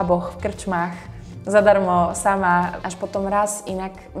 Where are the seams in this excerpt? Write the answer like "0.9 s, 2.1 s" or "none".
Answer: 2.8 s